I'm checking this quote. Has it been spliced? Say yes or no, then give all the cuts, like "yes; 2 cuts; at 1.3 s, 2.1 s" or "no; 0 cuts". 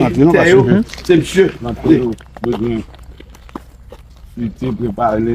yes; 1 cut; at 2.0 s